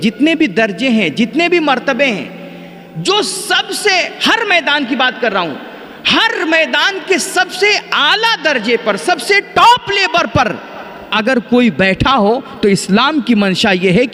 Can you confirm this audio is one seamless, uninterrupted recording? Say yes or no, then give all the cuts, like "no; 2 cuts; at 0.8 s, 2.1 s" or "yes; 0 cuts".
yes; 0 cuts